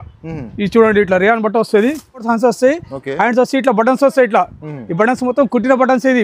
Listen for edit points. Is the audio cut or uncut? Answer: cut